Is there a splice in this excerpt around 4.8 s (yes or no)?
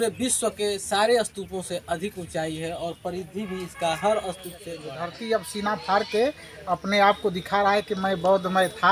yes